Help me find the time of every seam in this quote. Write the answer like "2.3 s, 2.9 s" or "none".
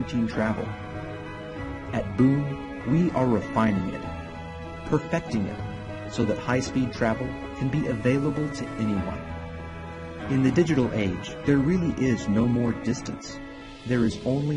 8.2 s